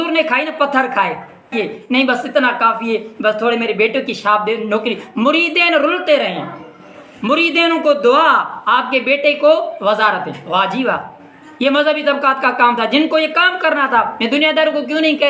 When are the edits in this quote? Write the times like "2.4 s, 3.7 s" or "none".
1.5 s